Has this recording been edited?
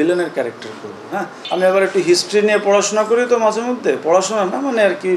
no; 0 cuts

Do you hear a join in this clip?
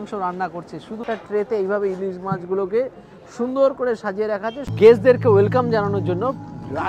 yes; 2 cuts; at 1.0 s, 4.6 s

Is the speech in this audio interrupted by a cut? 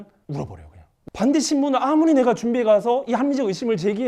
yes; 1 cut; at 1.0 s

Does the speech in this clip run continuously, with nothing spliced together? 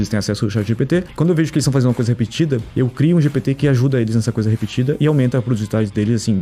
no; 2 cuts; at 1.1 s, 2.7 s

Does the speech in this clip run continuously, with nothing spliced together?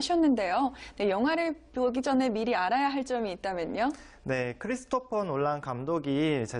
no; 1 cut; at 4.4 s

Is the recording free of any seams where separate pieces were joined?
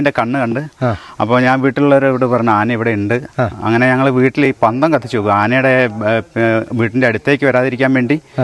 yes; 0 cuts

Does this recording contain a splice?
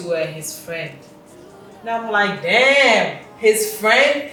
no; 0 cuts

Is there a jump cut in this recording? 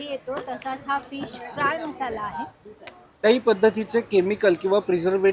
yes; 1 cut; at 3.2 s

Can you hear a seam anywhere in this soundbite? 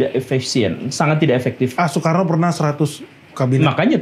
no; 0 cuts

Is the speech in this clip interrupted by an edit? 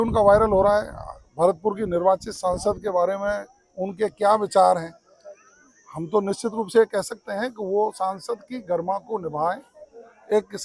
no; 0 cuts

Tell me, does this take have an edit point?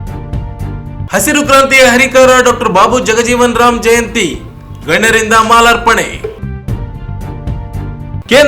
yes; 1 cut; at 1.0 s

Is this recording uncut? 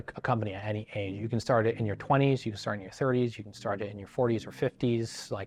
yes; 0 cuts

